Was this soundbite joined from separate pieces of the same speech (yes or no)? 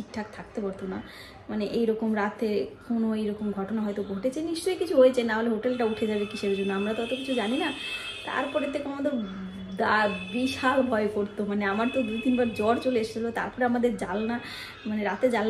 no